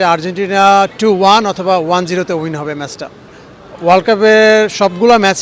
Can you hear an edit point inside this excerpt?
yes; 1 cut; at 3.2 s

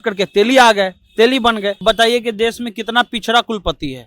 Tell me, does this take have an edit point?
yes; 1 cut; at 1.8 s

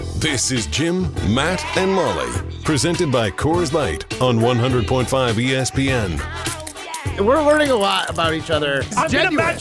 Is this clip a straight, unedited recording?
no; 1 cut; at 7.1 s

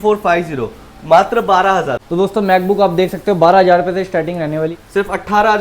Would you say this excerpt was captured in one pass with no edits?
no; 2 cuts; at 2.0 s, 4.7 s

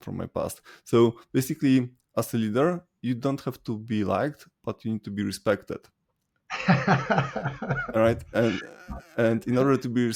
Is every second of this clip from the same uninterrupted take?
yes; 0 cuts

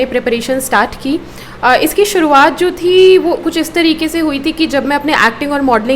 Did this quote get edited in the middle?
no; 0 cuts

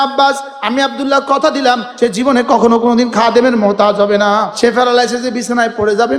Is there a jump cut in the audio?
yes; 2 cuts; at 1.9 s, 4.5 s

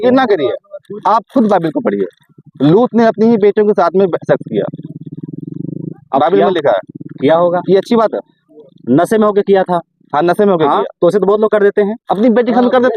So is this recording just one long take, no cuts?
yes; 0 cuts

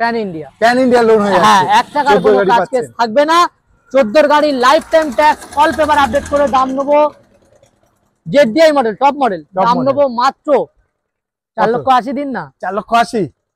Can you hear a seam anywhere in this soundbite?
no; 0 cuts

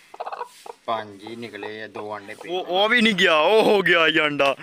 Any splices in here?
yes; 1 cut; at 2.6 s

